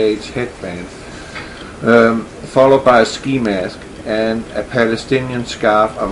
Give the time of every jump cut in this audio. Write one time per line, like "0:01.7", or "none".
0:04.6